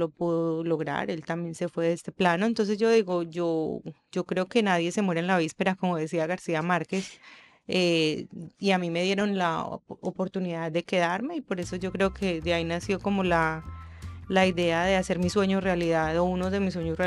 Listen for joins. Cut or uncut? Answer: uncut